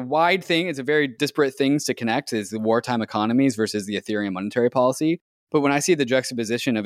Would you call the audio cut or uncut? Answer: cut